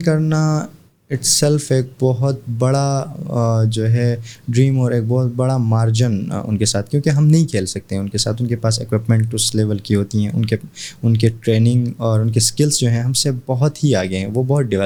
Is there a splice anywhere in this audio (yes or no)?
no